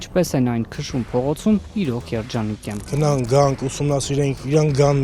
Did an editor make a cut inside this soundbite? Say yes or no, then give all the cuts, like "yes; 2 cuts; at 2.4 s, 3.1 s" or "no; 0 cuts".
yes; 1 cut; at 2.7 s